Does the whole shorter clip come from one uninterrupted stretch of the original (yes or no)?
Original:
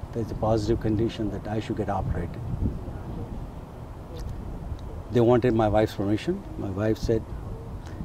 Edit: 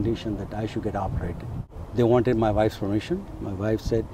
no